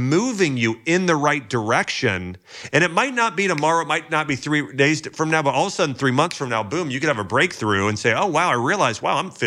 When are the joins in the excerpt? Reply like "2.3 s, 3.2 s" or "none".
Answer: none